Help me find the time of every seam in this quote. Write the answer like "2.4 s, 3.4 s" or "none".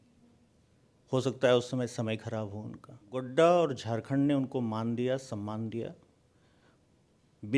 3.3 s